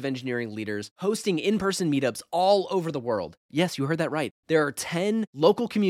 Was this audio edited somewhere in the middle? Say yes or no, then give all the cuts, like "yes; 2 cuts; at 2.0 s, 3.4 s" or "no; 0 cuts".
no; 0 cuts